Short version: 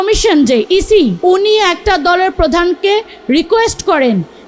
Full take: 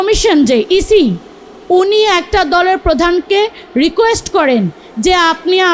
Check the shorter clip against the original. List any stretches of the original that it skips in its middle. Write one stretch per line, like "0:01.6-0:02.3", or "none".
0:01.2-0:01.6